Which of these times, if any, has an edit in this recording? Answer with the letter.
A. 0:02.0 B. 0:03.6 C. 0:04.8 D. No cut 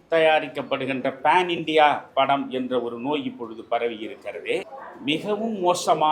C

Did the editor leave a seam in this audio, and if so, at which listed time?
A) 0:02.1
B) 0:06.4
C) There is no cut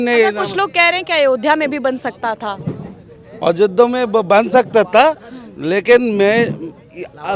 C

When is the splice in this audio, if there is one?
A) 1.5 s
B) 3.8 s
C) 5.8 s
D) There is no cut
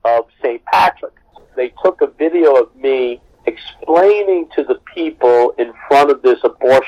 A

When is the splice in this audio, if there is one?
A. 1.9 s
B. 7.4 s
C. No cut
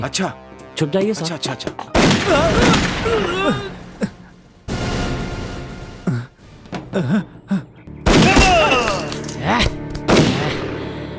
A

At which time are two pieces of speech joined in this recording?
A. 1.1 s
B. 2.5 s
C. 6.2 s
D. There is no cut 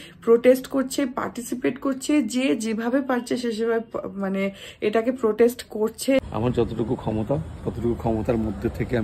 C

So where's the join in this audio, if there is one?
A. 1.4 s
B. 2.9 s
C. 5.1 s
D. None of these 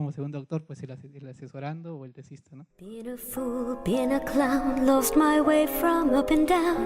B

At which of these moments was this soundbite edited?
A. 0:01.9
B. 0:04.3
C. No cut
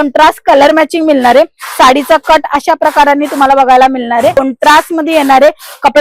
B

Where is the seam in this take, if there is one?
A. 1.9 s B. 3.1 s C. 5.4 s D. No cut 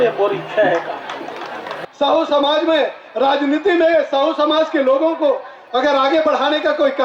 A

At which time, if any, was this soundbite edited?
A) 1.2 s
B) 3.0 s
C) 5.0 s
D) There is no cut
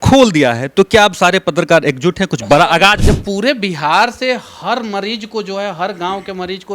B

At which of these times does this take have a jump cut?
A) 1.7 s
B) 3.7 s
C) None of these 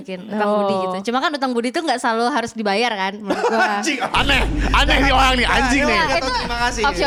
C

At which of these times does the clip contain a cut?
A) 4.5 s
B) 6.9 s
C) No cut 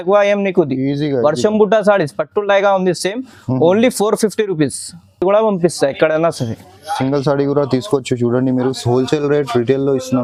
C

